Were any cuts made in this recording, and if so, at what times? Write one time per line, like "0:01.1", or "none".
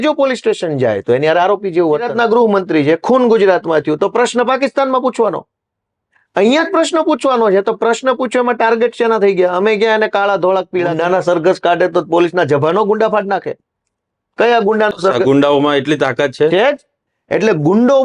0:02.1
0:11.0
0:17.0